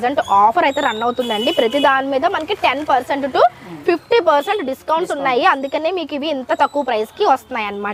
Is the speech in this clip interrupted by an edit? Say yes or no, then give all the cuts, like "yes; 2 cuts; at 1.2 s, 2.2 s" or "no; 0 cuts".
no; 0 cuts